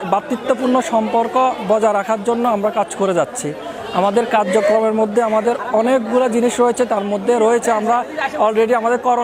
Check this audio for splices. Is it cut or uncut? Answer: uncut